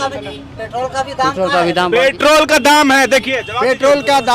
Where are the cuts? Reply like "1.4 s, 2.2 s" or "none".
none